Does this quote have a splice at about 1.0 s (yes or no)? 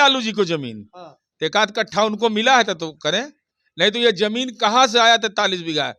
no